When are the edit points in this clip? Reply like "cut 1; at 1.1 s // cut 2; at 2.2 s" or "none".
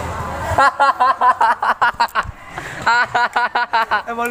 none